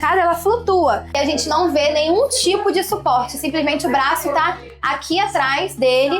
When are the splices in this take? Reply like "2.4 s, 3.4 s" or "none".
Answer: 1.1 s